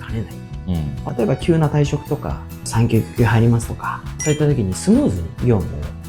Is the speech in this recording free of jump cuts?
no; 1 cut; at 1.2 s

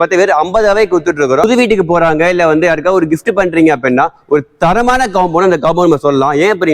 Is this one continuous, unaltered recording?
no; 1 cut; at 1.5 s

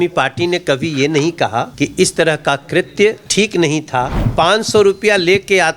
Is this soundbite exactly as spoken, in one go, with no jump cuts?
no; 3 cuts; at 1.7 s, 3.2 s, 4.2 s

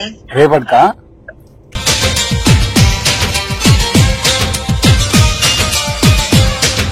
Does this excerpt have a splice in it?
no; 0 cuts

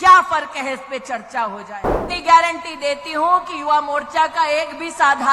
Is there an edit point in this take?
yes; 1 cut; at 2.0 s

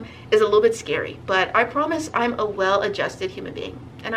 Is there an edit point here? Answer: no; 0 cuts

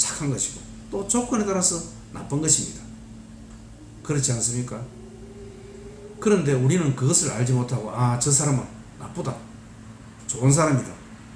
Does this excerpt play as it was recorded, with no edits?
yes; 0 cuts

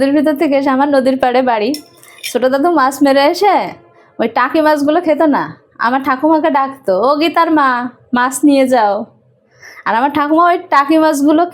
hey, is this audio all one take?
yes; 0 cuts

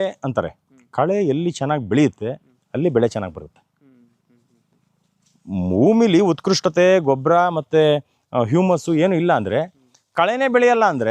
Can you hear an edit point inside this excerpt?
no; 0 cuts

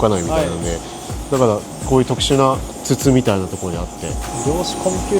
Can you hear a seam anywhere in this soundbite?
yes; 3 cuts; at 1.1 s, 2.7 s, 4.3 s

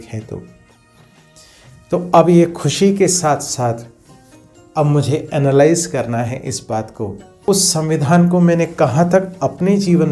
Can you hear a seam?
yes; 1 cut; at 7.4 s

